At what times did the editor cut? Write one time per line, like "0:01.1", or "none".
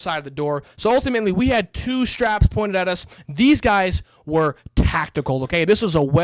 none